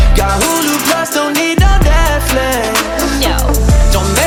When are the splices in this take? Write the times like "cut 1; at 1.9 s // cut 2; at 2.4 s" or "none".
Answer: none